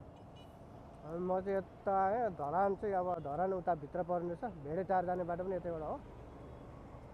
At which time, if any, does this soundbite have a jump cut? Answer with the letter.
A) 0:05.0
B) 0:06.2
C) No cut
C